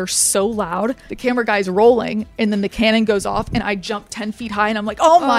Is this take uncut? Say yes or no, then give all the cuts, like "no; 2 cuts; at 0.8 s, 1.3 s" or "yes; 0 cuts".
no; 1 cut; at 1.1 s